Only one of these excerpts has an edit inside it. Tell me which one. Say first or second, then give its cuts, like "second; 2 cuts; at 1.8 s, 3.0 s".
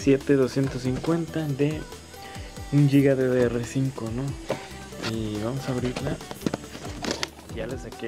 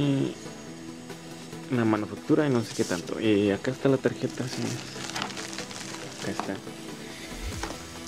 first; 1 cut; at 1.0 s